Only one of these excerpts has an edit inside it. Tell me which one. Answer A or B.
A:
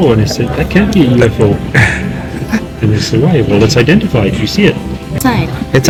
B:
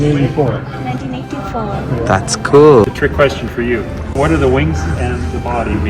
B